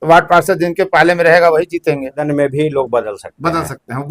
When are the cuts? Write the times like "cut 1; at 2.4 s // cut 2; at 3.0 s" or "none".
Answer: cut 1; at 2.3 s